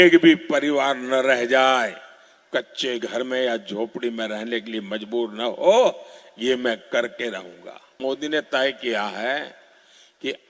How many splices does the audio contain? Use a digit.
1